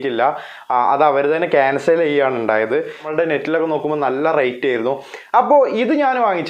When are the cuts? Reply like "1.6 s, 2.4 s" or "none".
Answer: 3.1 s